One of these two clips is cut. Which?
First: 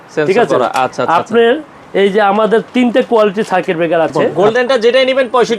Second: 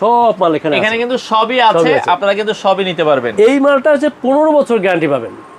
first; 1 cut; at 4.3 s

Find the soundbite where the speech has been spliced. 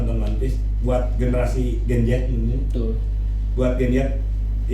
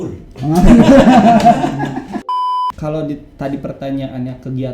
second; 1 cut; at 2.3 s

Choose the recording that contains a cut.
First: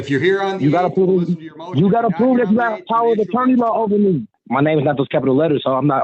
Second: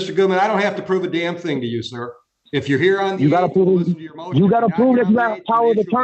first; 1 cut; at 4.4 s

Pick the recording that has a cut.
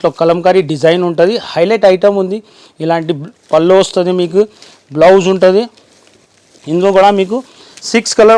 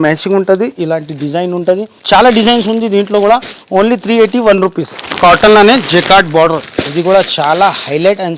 second; 2 cuts; at 1.9 s, 5.1 s

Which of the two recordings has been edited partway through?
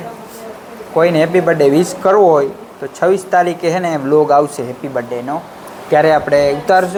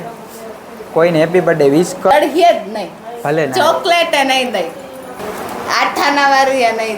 second; 2 cuts; at 2.1 s, 5.2 s

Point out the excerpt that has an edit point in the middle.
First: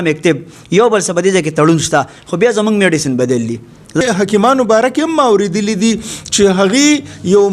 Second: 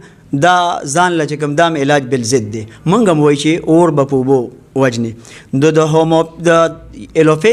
first; 1 cut; at 4.0 s

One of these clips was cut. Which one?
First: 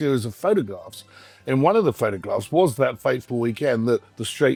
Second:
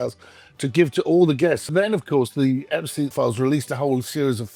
second; 2 cuts; at 1.7 s, 3.1 s

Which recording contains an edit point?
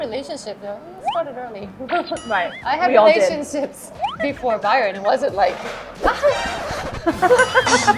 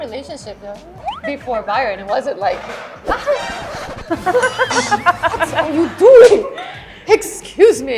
second; 1 cut; at 0.9 s

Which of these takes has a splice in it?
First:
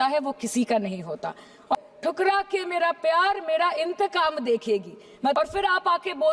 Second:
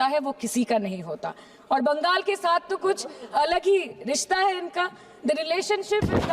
first; 2 cuts; at 1.8 s, 5.3 s

